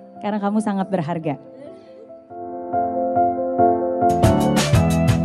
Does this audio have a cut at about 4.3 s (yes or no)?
yes